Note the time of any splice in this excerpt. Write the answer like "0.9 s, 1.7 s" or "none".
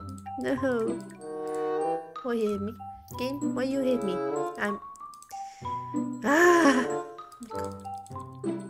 6.8 s